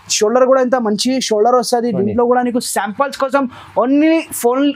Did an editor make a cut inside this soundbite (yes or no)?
no